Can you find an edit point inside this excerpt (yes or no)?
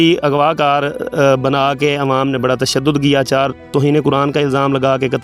yes